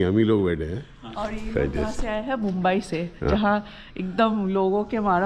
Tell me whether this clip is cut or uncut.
uncut